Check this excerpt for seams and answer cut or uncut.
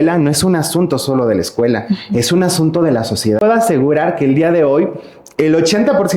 cut